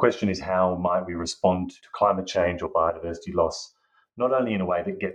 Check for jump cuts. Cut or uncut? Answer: cut